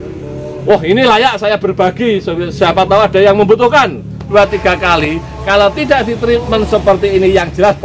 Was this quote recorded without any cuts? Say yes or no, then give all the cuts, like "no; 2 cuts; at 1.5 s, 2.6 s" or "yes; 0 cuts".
no; 1 cut; at 4.3 s